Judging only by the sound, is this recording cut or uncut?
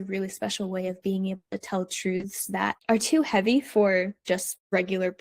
cut